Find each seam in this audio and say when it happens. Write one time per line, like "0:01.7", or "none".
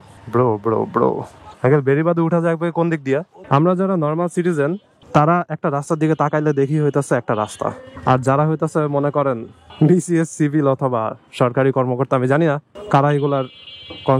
0:03.4